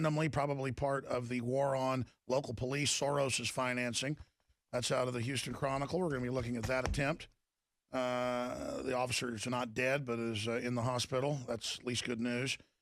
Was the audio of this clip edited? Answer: yes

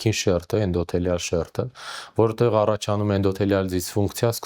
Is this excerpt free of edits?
yes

